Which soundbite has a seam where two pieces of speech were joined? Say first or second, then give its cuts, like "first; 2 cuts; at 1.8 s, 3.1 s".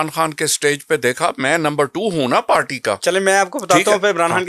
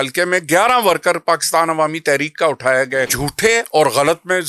second; 1 cut; at 3.1 s